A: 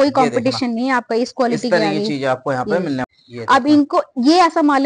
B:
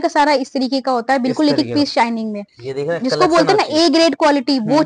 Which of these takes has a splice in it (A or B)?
A